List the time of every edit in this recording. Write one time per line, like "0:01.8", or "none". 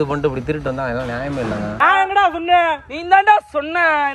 0:01.7